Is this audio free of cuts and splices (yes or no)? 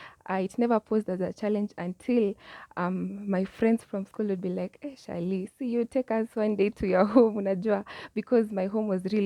yes